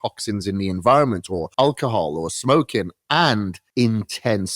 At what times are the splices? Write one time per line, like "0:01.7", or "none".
0:01.4
0:03.6